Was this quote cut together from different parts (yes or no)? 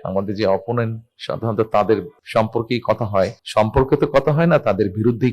yes